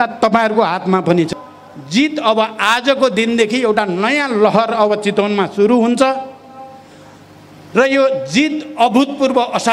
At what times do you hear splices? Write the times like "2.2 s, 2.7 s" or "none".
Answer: 1.3 s

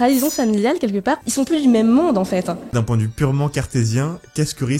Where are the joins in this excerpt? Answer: 1.2 s, 2.7 s

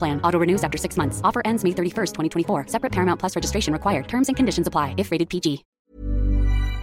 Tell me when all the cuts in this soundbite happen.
5.7 s

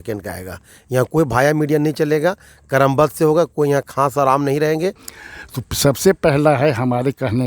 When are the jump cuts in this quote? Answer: 5.1 s

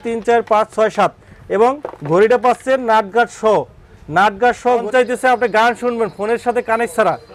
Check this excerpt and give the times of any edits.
4.8 s

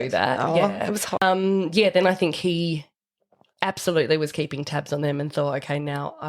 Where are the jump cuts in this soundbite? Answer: 1.2 s

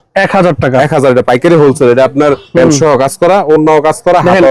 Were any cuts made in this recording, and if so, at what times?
2.4 s

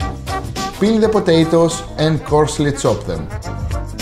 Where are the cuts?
none

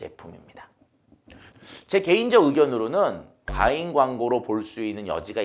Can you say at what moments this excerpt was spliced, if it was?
1.4 s

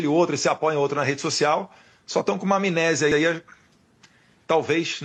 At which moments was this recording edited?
none

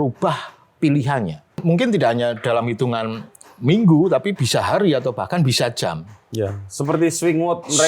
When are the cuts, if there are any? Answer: 1.6 s

